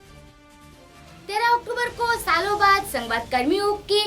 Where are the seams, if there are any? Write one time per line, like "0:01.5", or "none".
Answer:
0:01.0